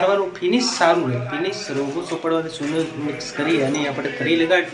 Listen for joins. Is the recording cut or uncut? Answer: uncut